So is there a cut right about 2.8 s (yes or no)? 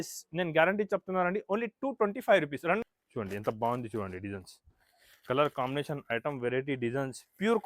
yes